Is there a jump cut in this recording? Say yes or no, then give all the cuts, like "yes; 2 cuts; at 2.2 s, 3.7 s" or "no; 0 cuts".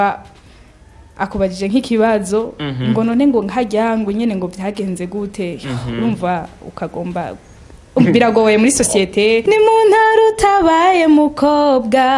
yes; 1 cut; at 9.4 s